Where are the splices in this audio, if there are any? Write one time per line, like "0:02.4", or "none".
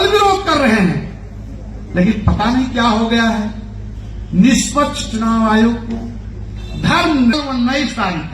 0:07.3